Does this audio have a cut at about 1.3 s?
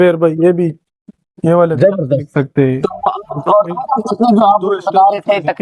no; 0 cuts

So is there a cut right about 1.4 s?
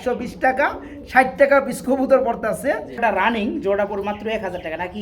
no; 1 cut; at 3.0 s

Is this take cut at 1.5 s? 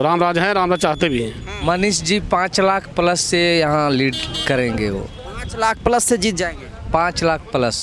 yes; 1 cut; at 1.5 s

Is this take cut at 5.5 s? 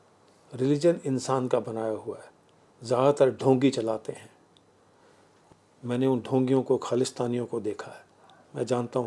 yes; 1 cut; at 5.5 s

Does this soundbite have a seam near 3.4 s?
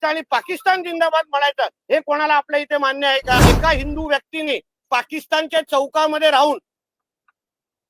yes; 1 cut; at 3.4 s

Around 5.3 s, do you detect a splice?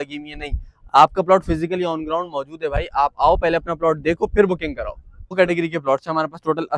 yes; 1 cut; at 5.3 s

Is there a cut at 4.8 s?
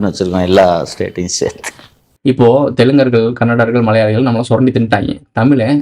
no; 1 cut; at 2.0 s

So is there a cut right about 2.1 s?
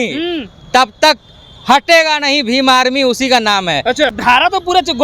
no; 1 cut; at 4.1 s

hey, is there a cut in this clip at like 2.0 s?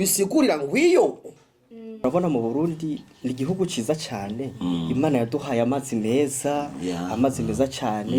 yes; 1 cut; at 2.0 s

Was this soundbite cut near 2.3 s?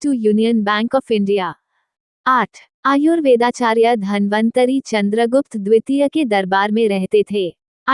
yes; 1 cut; at 2.3 s

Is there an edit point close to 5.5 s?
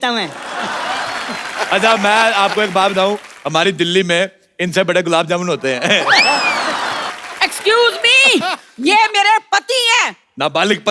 no; 1 cut; at 7.1 s

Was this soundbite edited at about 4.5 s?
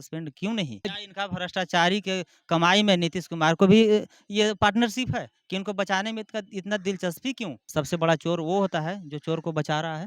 no; 2 cuts; at 0.9 s, 7.6 s

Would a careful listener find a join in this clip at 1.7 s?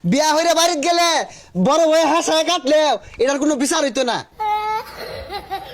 no; 1 cut; at 4.3 s

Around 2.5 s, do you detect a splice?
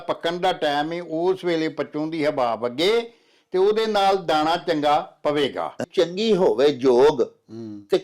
no; 1 cut; at 5.8 s

